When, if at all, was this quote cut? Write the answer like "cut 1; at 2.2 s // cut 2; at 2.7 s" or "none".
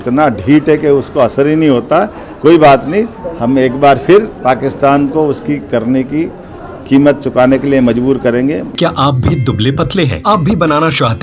cut 1; at 8.7 s // cut 2; at 10.2 s

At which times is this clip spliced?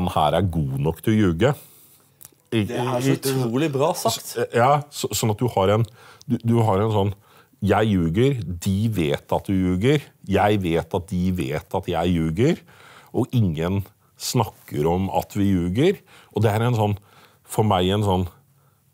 none

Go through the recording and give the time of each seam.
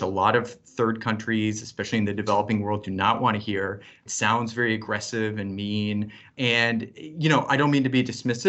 cut 1; at 4.0 s

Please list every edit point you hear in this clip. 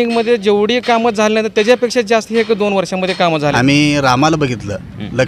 cut 1; at 3.5 s

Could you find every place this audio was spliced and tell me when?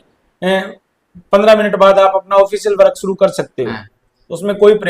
none

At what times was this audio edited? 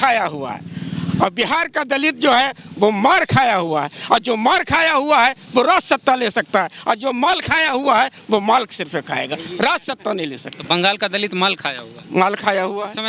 none

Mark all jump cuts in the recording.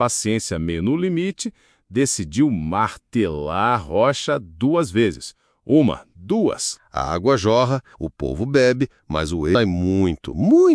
cut 1; at 7.3 s

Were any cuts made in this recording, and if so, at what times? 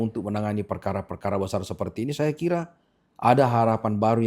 none

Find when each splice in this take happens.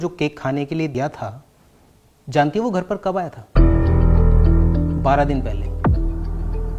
cut 1; at 0.9 s

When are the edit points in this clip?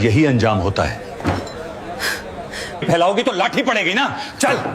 cut 1; at 2.8 s

